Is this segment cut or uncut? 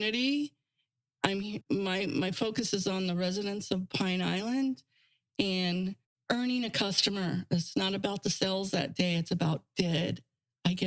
cut